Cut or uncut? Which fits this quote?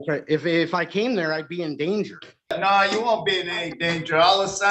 cut